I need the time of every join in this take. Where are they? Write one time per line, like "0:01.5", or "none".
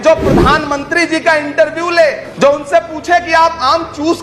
0:02.3